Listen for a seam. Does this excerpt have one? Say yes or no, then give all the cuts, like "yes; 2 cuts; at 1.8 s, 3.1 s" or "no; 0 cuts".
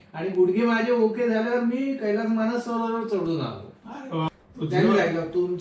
yes; 1 cut; at 4.3 s